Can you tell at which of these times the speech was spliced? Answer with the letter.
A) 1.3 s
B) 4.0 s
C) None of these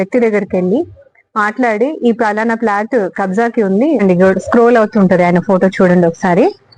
B